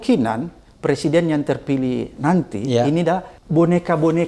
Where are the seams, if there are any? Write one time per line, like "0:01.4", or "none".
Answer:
0:03.4